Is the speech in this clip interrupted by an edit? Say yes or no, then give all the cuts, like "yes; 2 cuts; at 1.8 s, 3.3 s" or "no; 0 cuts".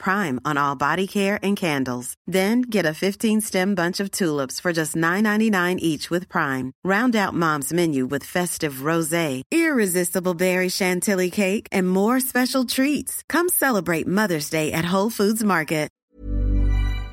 yes; 1 cut; at 15.9 s